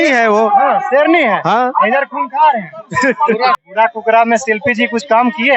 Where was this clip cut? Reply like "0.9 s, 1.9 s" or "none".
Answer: 3.6 s